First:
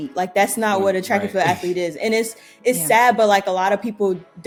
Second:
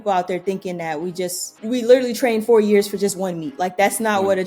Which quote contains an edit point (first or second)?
second